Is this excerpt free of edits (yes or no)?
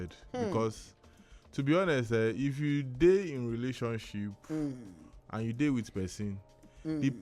yes